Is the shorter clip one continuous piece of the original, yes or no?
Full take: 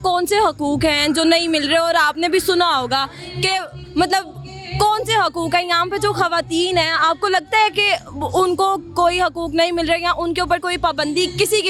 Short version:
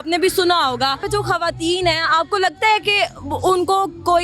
no